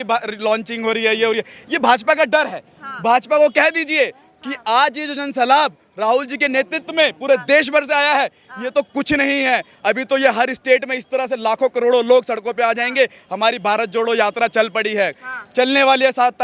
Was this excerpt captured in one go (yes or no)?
yes